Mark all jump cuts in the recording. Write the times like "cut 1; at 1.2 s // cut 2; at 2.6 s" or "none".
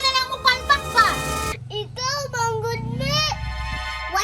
cut 1; at 1.6 s